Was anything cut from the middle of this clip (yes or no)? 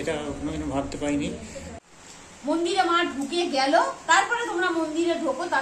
yes